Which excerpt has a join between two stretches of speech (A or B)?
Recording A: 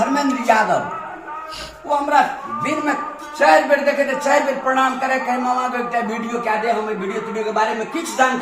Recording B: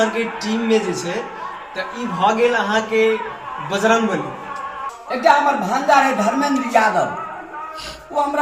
B